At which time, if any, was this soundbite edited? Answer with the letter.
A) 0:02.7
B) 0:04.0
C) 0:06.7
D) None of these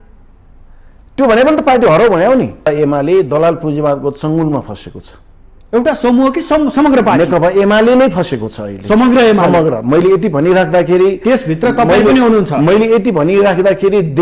A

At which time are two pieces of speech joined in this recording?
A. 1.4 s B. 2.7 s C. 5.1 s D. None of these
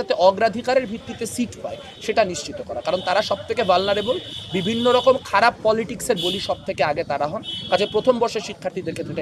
D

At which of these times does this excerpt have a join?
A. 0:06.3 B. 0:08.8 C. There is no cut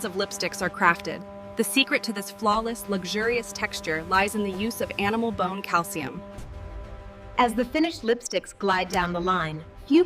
A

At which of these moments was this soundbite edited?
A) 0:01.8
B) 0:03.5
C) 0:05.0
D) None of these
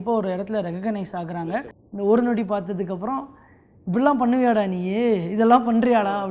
A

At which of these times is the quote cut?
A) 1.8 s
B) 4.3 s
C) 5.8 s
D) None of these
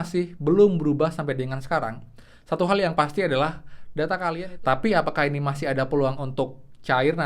B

